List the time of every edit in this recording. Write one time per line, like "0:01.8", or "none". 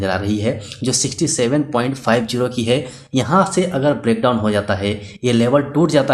none